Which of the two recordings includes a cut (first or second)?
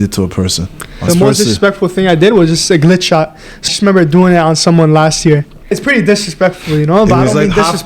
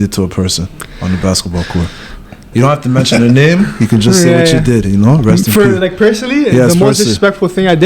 first